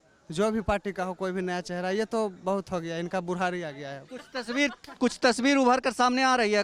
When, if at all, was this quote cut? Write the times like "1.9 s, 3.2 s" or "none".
none